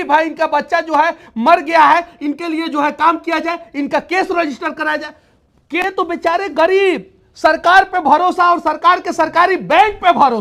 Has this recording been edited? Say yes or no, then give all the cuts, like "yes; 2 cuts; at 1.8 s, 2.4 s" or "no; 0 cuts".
yes; 1 cut; at 5.8 s